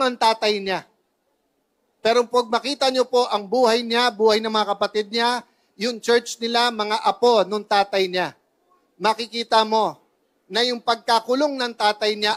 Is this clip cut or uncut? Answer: uncut